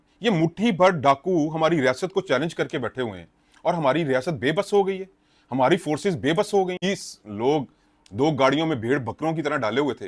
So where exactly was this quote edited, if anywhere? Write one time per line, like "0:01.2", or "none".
0:06.8